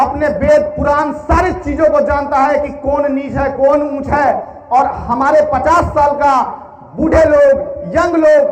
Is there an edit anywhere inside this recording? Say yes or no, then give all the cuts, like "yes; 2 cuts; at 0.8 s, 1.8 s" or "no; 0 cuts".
no; 0 cuts